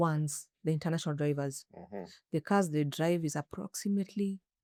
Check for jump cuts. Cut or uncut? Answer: uncut